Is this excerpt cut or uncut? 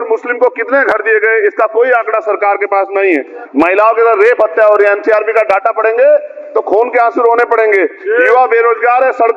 cut